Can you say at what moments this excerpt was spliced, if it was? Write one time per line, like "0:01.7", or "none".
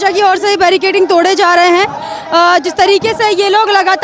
none